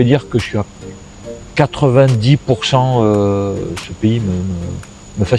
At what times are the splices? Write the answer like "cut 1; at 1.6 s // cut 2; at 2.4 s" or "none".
none

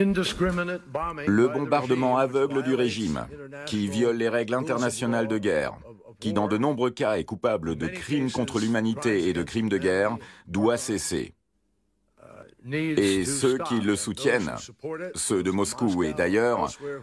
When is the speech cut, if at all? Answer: cut 1; at 15.9 s

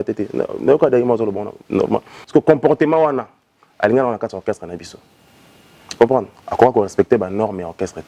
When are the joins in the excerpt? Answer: cut 1; at 2.1 s

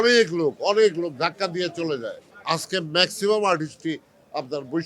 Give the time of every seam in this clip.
cut 1; at 2.3 s

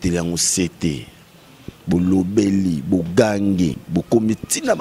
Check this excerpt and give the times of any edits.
cut 1; at 3.8 s

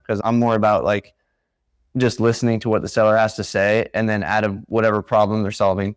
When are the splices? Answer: none

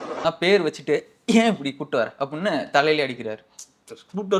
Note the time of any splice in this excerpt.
none

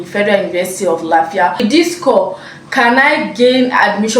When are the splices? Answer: cut 1; at 1.6 s

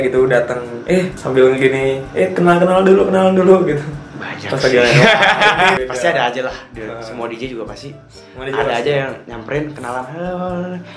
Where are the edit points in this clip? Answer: cut 1; at 1.2 s // cut 2; at 5.8 s

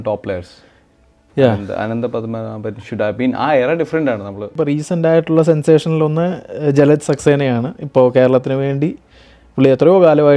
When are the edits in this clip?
cut 1; at 4.6 s

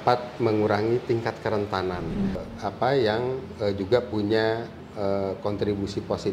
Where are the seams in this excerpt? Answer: cut 1; at 2.5 s

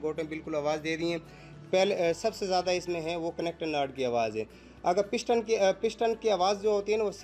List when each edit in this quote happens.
none

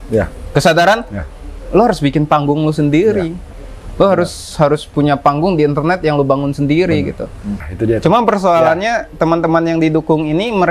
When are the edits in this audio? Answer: cut 1; at 7.7 s

